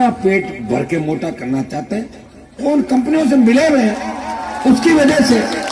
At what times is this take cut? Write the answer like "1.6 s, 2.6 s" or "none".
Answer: none